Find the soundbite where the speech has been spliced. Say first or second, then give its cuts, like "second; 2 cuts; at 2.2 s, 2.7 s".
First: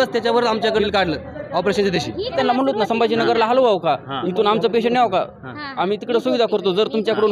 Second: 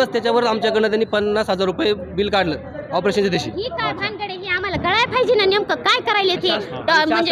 first; 2 cuts; at 0.8 s, 2.3 s